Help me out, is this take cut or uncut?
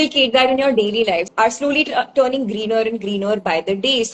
cut